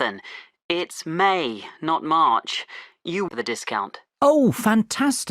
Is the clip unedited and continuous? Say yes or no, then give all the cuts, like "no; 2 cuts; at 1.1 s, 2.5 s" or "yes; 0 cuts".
no; 1 cut; at 3.3 s